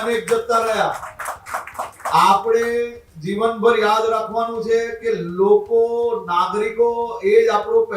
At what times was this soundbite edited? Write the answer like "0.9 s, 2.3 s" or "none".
none

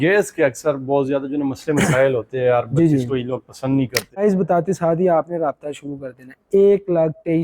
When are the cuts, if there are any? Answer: 4.2 s

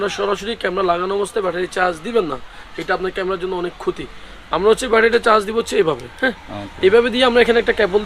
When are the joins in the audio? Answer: none

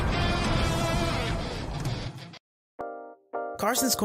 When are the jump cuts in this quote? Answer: 2.8 s

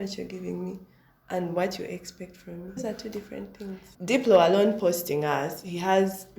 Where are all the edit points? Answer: 4.0 s

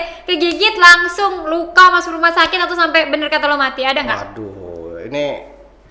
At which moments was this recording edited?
none

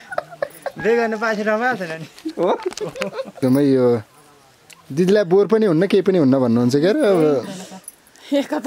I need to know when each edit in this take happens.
3.3 s

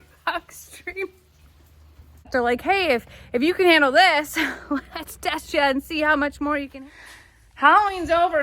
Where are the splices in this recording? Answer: 2.3 s, 6.7 s

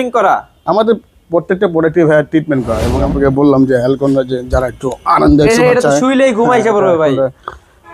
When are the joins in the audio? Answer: 3.0 s

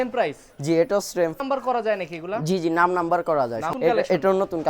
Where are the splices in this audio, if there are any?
1.3 s, 3.7 s

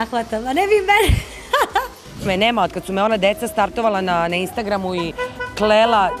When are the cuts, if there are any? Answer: 2.2 s

